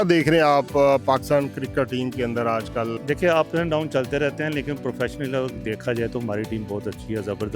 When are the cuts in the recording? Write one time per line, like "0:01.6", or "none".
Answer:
0:02.9